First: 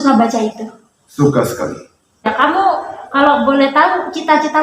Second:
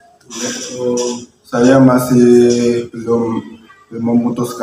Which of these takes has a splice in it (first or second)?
first